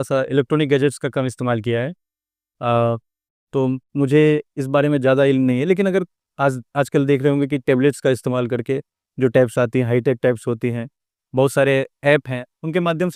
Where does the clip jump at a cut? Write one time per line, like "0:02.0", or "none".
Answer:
none